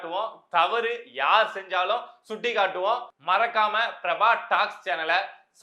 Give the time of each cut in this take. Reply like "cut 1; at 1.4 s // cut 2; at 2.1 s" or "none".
cut 1; at 3.1 s